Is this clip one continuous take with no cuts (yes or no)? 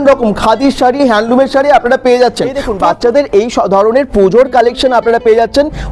no